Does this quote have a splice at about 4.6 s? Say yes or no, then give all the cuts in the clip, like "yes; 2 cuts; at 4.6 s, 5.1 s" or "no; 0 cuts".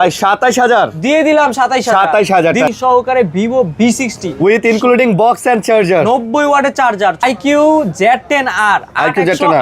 no; 2 cuts; at 2.7 s, 7.2 s